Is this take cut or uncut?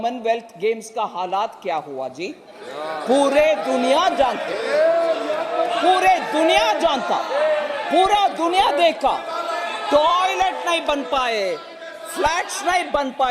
uncut